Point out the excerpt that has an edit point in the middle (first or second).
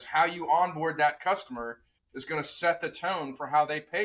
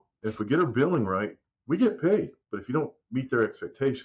second